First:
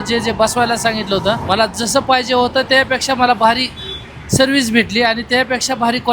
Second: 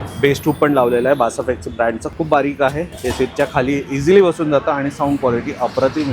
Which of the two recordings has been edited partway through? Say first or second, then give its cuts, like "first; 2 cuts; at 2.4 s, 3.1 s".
first; 1 cut; at 1.4 s